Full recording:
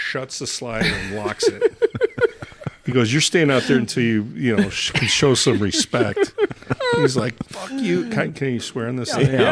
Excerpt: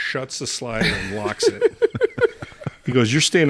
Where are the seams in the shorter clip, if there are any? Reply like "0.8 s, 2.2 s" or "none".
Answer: none